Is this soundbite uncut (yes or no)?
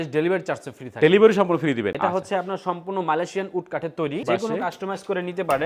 no